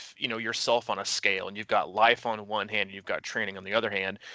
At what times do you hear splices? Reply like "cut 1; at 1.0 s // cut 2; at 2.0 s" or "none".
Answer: none